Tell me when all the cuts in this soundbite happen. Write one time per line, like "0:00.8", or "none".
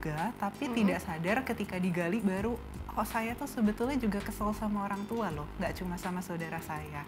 none